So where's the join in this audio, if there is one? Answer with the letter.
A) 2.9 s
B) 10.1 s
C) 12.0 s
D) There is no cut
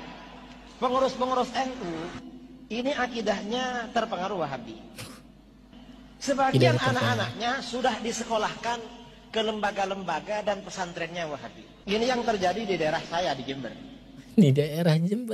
C